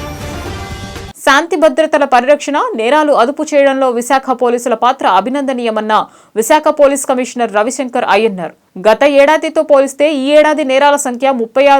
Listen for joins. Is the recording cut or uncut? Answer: cut